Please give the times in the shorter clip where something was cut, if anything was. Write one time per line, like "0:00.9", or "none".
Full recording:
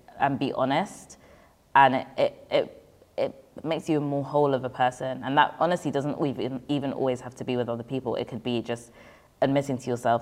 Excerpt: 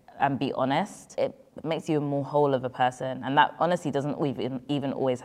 0:01.0